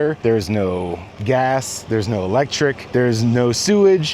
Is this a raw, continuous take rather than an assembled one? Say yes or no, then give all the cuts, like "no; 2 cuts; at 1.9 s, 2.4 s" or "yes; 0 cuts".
yes; 0 cuts